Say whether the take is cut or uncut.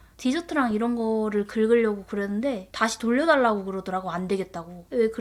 uncut